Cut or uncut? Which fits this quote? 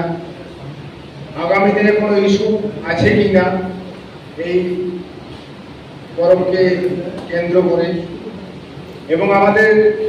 uncut